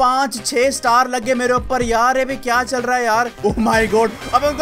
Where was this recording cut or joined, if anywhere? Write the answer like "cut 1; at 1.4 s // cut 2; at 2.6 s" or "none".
cut 1; at 3.3 s